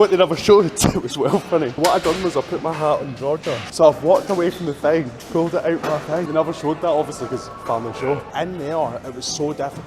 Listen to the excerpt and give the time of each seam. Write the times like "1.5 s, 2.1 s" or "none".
1.7 s, 3.6 s, 6.3 s, 8.3 s

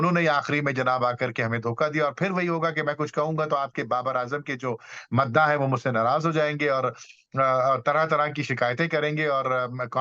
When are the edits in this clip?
none

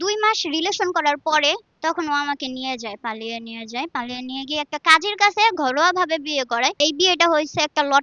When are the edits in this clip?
1.7 s, 6.8 s

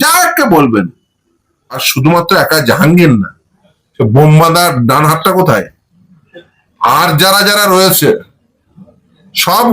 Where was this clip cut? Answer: 1.9 s

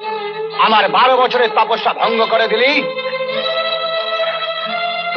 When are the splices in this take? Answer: none

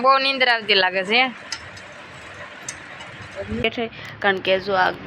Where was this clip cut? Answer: 3.6 s

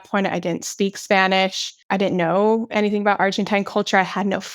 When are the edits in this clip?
1.7 s

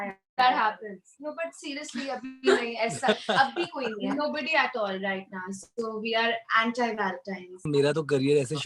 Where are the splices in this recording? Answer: 7.7 s

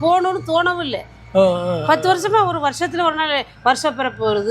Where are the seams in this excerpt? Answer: none

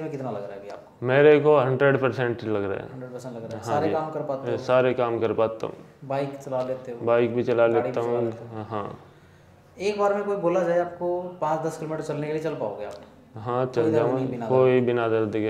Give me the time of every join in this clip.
none

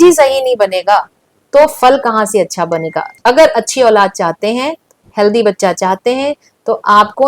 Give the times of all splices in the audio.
3.1 s

